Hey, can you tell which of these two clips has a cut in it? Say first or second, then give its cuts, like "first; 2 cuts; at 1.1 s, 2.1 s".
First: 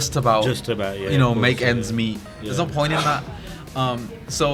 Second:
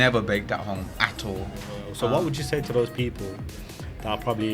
second; 1 cut; at 1.8 s